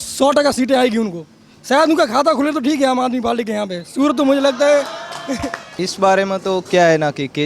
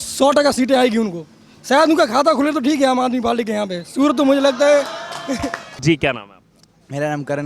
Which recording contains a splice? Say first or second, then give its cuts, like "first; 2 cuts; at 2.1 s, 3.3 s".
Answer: first; 1 cut; at 5.7 s